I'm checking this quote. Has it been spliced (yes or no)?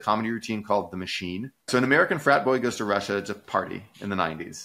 yes